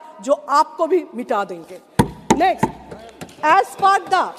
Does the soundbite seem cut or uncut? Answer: uncut